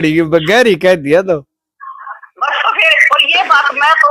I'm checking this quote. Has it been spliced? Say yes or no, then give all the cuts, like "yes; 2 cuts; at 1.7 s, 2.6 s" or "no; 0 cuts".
no; 0 cuts